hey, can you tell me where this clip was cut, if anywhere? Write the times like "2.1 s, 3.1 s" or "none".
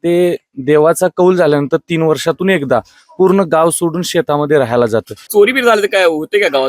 5.2 s